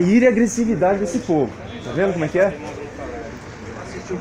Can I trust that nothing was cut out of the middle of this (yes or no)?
yes